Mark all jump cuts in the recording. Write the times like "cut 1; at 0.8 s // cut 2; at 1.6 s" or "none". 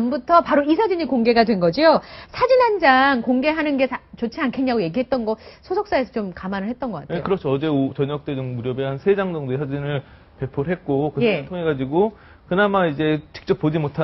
cut 1; at 12.5 s